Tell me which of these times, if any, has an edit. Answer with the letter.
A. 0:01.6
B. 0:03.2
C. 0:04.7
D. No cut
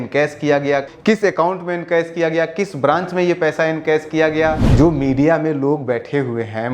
C